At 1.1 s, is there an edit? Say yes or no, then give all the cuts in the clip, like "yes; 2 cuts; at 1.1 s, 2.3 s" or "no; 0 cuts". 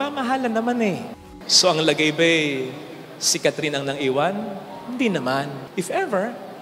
yes; 1 cut; at 1.1 s